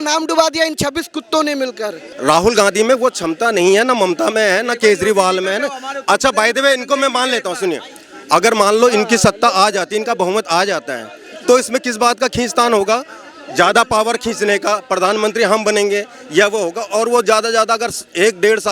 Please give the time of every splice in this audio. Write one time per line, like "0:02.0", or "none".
0:02.0